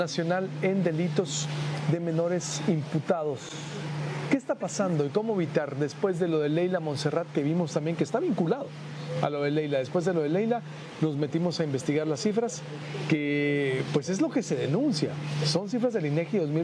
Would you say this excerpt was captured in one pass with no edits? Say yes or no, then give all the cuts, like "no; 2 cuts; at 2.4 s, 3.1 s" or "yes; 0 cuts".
yes; 0 cuts